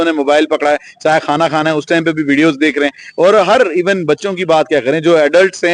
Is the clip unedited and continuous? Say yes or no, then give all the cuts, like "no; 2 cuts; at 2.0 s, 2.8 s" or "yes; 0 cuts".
yes; 0 cuts